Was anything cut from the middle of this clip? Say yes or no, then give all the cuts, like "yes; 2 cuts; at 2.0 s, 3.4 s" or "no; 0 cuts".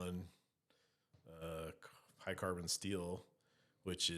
no; 0 cuts